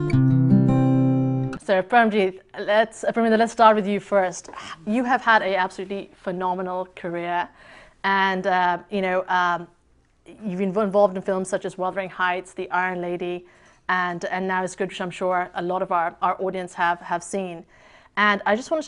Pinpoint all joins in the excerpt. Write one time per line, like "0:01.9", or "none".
0:01.5

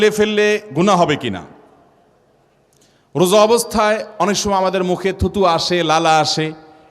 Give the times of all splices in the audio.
none

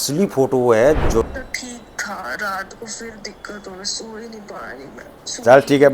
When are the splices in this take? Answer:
0:01.3

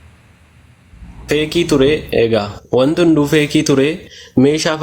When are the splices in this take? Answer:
0:01.2

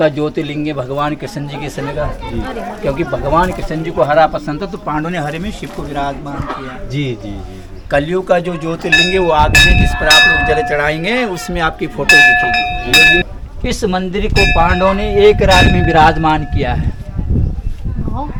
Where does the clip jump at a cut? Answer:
none

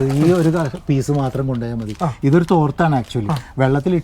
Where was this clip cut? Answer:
none

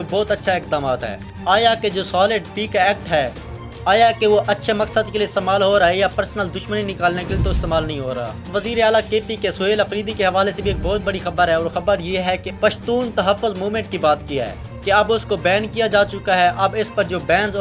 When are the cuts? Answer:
0:01.2
0:08.5
0:12.5

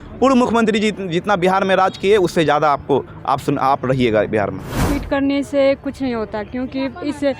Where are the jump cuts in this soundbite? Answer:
0:04.9

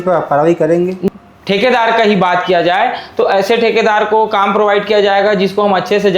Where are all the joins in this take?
0:01.0

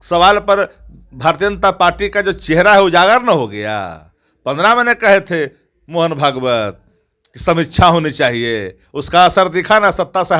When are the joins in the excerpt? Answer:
none

